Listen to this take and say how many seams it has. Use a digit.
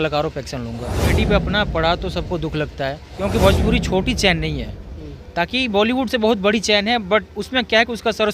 2